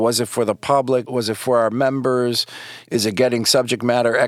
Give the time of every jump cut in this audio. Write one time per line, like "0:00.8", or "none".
0:01.1